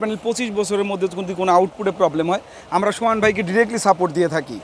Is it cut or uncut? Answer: uncut